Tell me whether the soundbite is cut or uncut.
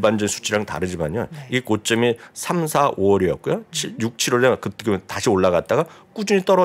uncut